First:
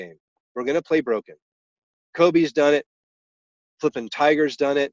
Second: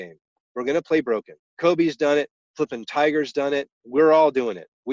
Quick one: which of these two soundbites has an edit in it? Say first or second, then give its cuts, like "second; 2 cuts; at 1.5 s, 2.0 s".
second; 3 cuts; at 1.4 s, 2.4 s, 3.8 s